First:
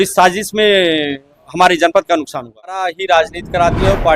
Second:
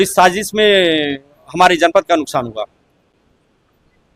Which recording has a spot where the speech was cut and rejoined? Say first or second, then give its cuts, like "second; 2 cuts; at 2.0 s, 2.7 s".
first; 1 cut; at 3.0 s